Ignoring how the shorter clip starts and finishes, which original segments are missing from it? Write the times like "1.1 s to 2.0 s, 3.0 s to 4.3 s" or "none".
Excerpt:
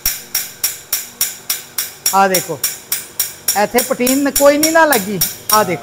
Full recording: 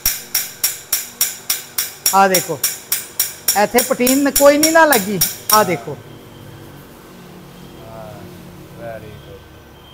none